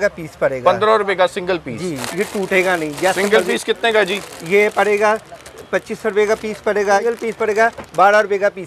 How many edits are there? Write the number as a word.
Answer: two